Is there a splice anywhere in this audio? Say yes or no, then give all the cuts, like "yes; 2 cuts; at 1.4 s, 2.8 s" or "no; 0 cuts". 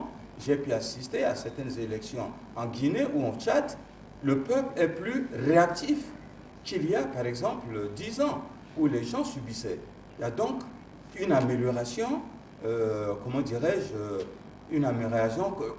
no; 0 cuts